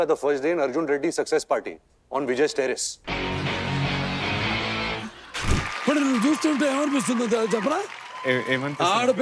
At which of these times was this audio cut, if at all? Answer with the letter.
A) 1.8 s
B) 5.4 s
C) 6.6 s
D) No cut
B